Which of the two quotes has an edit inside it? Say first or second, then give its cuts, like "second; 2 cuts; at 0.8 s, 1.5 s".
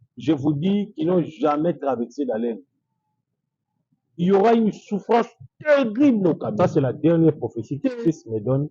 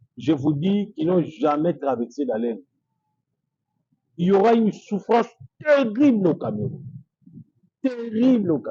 first; 1 cut; at 6.5 s